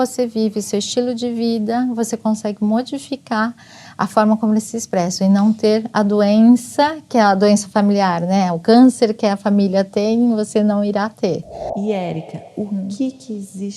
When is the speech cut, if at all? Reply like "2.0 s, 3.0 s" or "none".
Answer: 11.7 s